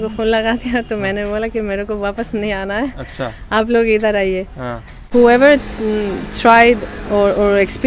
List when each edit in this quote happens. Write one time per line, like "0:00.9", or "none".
0:04.9